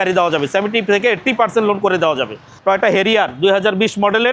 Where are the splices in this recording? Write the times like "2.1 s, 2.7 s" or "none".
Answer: none